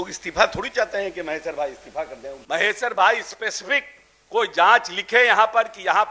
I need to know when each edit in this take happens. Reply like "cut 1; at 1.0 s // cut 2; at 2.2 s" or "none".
cut 1; at 2.3 s